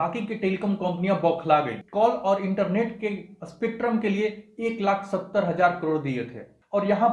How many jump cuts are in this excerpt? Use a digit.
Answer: 1